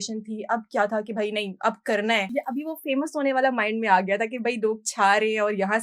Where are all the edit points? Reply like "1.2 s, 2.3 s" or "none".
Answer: 2.3 s